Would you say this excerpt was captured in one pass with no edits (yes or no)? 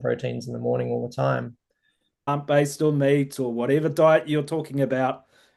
no